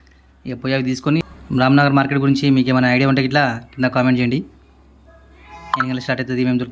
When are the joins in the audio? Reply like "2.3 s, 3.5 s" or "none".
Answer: 1.2 s